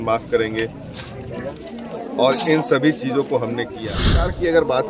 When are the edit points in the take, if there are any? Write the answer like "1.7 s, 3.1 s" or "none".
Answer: 3.9 s